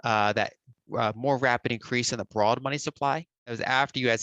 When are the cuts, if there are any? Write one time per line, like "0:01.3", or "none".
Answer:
0:03.3